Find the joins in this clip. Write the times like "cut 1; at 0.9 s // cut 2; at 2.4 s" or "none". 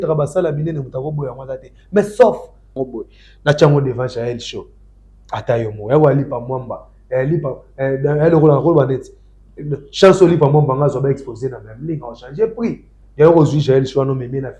cut 1; at 2.8 s